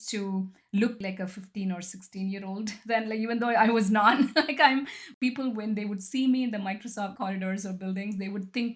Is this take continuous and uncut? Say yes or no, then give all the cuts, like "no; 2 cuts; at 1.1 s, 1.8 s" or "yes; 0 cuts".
no; 3 cuts; at 1.0 s, 5.1 s, 7.1 s